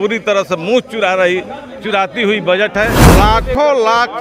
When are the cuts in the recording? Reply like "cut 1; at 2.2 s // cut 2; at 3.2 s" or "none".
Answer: cut 1; at 3.0 s